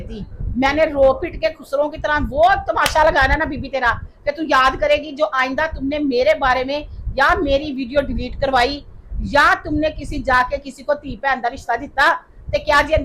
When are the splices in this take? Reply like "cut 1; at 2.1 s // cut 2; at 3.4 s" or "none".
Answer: none